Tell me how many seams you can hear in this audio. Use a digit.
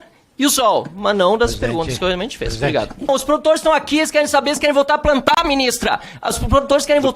1